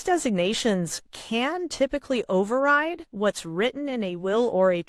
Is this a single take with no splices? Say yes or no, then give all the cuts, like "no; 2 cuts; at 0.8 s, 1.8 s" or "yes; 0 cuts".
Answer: yes; 0 cuts